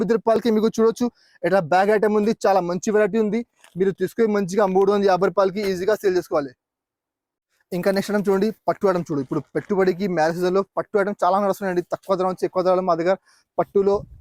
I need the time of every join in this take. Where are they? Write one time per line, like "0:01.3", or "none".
none